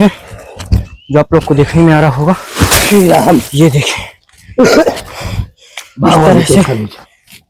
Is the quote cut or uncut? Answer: uncut